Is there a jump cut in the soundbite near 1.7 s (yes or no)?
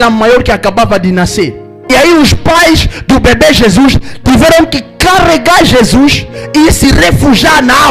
yes